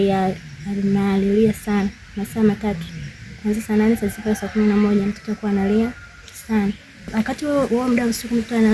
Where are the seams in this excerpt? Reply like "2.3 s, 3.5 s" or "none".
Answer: 7.0 s